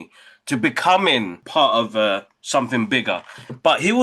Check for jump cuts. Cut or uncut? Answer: cut